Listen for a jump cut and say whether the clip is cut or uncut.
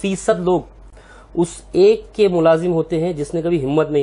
uncut